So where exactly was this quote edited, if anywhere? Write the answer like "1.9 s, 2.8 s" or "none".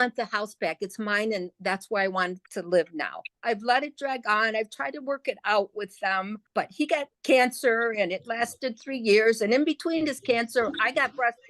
3.3 s, 6.9 s